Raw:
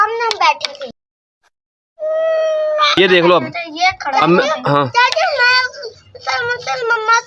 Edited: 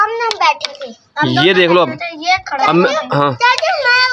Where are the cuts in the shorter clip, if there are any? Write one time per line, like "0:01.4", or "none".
0:01.4